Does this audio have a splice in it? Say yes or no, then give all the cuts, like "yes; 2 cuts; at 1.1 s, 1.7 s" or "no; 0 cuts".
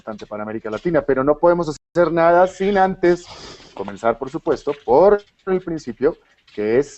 yes; 1 cut; at 1.5 s